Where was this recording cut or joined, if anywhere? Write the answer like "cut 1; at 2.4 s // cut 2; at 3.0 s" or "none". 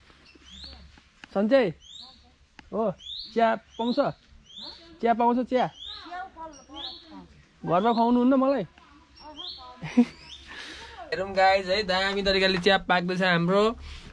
cut 1; at 11.2 s